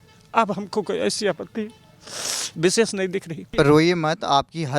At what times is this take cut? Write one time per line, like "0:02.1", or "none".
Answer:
0:03.5